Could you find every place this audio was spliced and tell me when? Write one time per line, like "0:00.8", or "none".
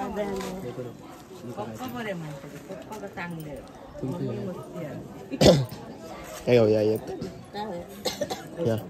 none